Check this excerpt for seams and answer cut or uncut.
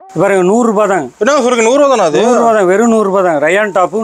uncut